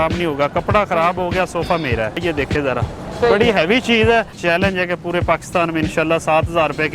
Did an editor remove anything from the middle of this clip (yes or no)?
yes